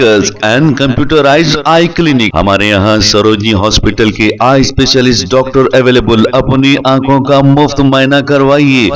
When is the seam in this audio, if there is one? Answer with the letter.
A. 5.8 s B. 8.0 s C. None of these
C